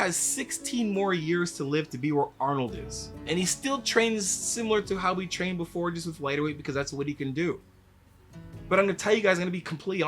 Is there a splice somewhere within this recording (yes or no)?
yes